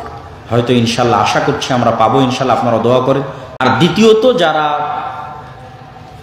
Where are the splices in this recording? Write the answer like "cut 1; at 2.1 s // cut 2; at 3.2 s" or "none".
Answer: cut 1; at 3.4 s